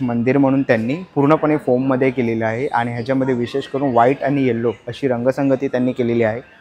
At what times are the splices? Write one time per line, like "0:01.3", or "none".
none